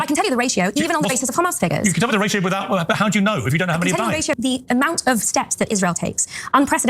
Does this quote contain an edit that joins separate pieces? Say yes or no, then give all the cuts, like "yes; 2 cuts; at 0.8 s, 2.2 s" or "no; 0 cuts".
yes; 1 cut; at 4.6 s